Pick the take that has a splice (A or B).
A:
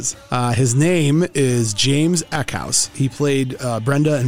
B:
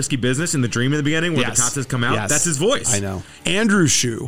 B